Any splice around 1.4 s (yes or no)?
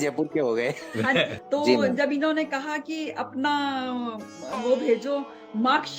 yes